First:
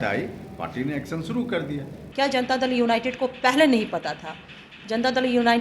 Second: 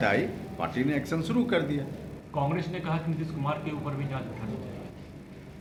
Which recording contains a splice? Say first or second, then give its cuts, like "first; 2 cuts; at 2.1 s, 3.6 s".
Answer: first; 1 cut; at 2.0 s